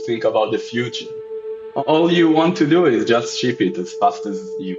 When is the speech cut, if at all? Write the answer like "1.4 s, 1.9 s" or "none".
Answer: none